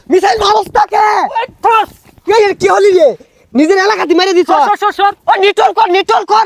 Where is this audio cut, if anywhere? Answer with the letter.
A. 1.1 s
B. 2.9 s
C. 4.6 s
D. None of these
D